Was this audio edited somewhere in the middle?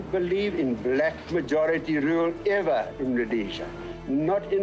no; 0 cuts

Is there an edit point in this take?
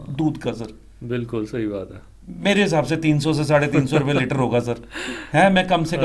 no; 0 cuts

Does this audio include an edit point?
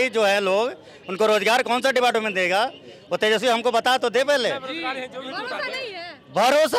no; 0 cuts

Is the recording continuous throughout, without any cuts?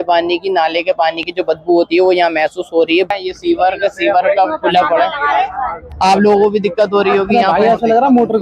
no; 1 cut; at 3.1 s

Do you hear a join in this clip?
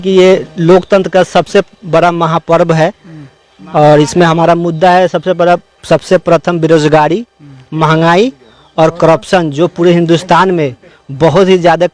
no; 0 cuts

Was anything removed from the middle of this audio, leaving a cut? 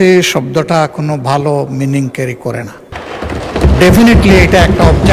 yes; 1 cut; at 3.0 s

